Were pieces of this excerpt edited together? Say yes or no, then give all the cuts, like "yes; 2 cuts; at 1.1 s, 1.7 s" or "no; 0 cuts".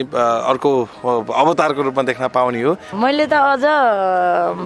yes; 1 cut; at 2.9 s